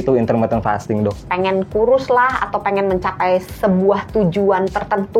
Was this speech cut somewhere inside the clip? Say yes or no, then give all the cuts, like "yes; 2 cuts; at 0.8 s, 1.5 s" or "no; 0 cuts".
yes; 1 cut; at 1.2 s